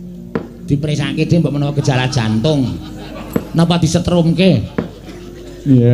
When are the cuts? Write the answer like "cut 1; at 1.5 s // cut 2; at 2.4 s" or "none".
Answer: cut 1; at 1.5 s